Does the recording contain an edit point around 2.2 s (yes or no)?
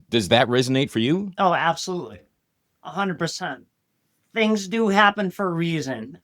no